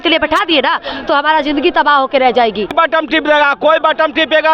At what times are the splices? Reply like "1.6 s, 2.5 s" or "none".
2.7 s